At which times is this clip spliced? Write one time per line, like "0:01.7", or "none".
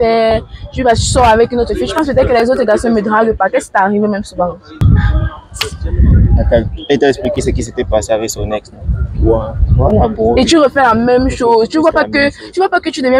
0:04.8